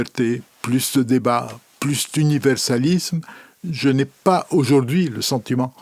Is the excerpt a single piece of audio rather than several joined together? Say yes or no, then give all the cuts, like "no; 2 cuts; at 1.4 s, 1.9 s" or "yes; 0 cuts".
yes; 0 cuts